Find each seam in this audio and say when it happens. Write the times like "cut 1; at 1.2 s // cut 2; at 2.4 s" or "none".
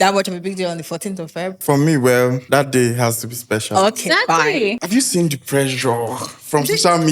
cut 1; at 1.6 s // cut 2; at 2.4 s // cut 3; at 4.8 s